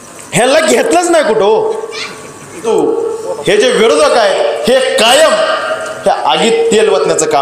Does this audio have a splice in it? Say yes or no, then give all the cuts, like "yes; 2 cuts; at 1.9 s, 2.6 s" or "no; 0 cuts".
yes; 1 cut; at 2.6 s